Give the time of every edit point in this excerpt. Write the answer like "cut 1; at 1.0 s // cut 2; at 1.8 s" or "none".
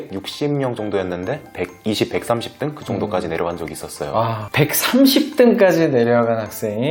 cut 1; at 1.4 s